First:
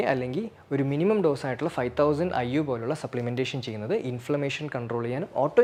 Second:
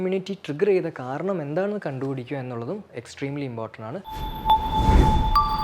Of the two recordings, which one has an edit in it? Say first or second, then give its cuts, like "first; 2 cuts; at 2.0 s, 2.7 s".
second; 1 cut; at 4.1 s